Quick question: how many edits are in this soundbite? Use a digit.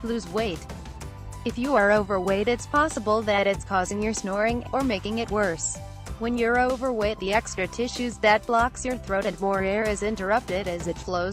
1